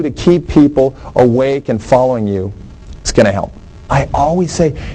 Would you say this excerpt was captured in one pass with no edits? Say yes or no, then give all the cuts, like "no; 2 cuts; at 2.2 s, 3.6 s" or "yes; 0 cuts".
no; 1 cut; at 3.8 s